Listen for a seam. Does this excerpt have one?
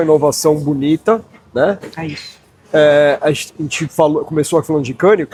no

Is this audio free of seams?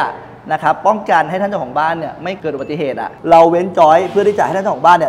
no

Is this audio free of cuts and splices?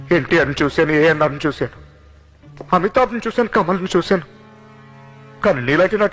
yes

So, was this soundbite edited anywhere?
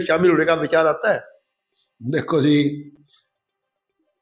no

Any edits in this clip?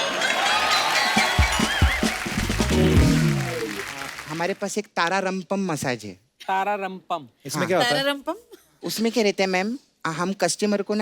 yes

